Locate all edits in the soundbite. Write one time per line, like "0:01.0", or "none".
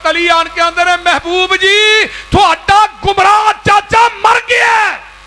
none